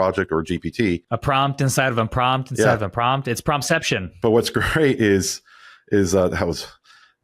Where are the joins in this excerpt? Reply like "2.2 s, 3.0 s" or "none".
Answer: 1.4 s

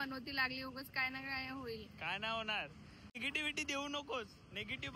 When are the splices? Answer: 3.2 s

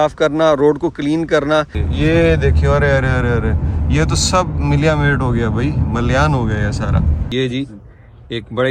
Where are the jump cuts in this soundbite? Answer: 1.8 s, 7.3 s

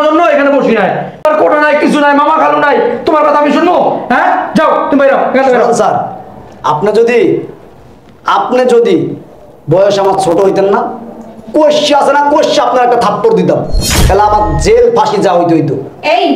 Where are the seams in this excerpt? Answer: 1.2 s

